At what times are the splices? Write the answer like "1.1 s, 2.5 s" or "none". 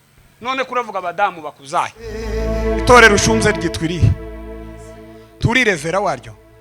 2.3 s